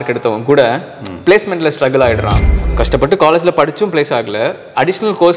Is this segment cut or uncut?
cut